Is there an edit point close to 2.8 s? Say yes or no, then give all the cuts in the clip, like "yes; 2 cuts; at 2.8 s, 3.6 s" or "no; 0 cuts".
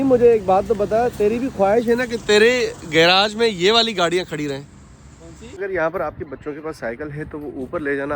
no; 1 cut; at 5.5 s